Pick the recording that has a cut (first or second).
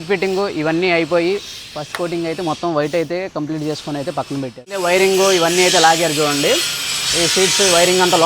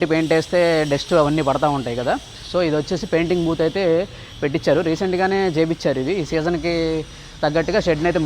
first